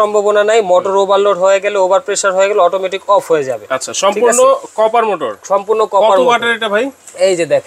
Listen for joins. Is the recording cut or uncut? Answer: uncut